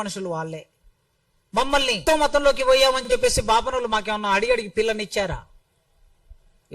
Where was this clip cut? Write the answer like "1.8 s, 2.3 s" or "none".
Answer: 2.0 s